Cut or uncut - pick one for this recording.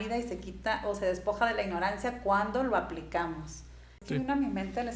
cut